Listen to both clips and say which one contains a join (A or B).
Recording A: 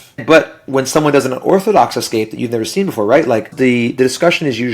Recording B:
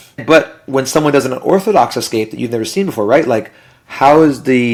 A